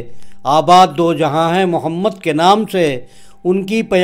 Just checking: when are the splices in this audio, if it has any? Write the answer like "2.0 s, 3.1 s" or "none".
none